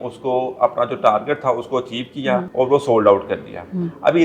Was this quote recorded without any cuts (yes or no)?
no